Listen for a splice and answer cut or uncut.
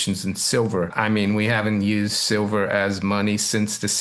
cut